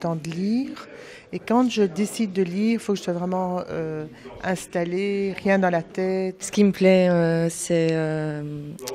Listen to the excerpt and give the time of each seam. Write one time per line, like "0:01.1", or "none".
0:06.4